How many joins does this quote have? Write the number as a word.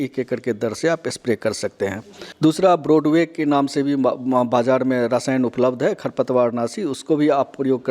zero